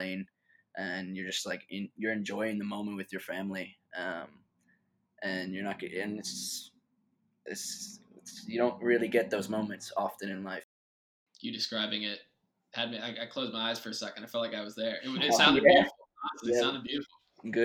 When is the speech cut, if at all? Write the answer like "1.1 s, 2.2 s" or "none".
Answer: 10.7 s